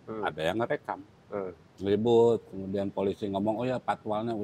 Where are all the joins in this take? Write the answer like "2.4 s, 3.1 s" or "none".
1.6 s